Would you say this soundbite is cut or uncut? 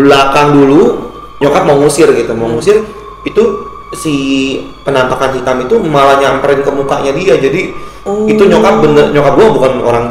cut